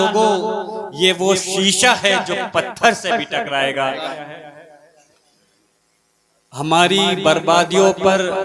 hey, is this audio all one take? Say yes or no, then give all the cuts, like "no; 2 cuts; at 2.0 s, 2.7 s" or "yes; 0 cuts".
no; 1 cut; at 4.1 s